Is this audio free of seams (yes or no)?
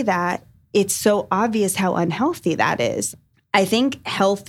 no